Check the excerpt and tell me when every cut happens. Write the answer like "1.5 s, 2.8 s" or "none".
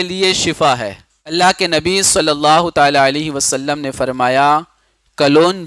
1.3 s